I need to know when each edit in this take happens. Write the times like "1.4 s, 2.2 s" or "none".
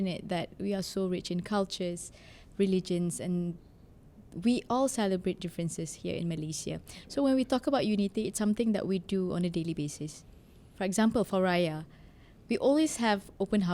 none